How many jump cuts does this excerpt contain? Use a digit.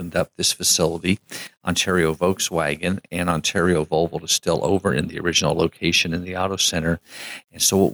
0